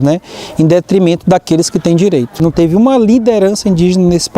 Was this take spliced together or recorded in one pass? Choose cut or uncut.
cut